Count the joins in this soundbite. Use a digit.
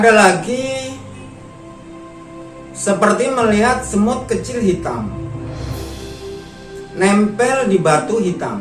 2